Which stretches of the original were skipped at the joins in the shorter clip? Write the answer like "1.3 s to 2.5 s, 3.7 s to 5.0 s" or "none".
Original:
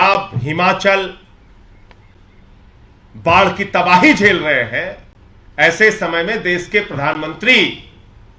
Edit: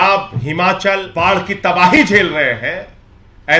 1.1 s to 3.2 s